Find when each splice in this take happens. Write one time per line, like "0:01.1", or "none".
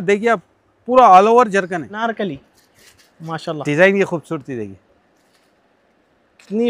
0:01.9